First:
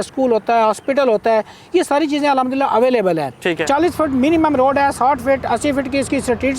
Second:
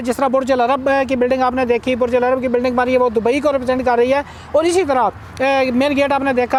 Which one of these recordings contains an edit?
first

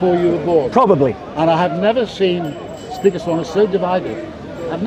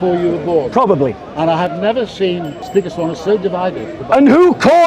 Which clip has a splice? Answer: second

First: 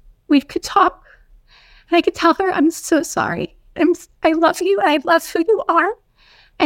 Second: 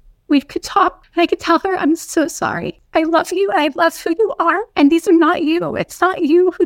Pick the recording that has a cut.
second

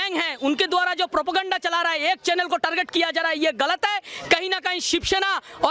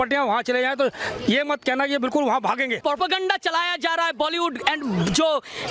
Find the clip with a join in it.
second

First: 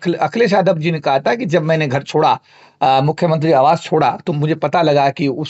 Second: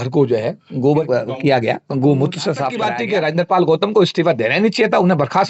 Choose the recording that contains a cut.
second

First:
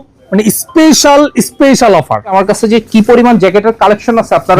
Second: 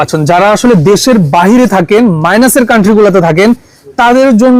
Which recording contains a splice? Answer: first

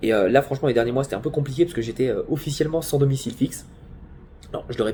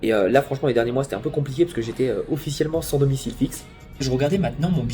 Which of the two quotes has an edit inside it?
second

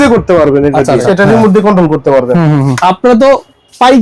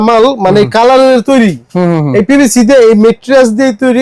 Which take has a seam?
first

